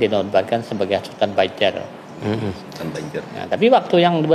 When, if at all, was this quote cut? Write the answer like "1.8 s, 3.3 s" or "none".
none